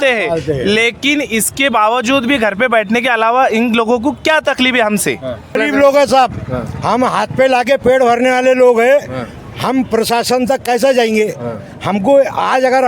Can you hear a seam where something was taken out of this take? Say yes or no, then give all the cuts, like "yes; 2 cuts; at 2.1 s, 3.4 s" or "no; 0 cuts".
yes; 1 cut; at 5.6 s